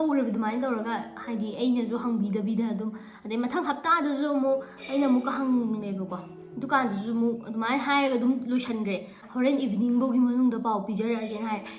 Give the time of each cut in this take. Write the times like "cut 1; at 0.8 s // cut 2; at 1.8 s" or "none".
cut 1; at 9.2 s